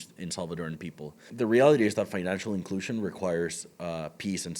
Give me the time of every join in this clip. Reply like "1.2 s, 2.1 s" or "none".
1.2 s